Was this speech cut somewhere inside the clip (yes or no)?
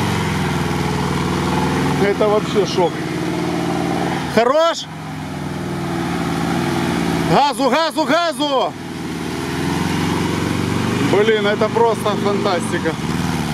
no